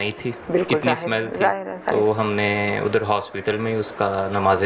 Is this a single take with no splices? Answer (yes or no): yes